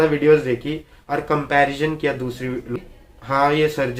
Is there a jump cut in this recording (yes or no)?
yes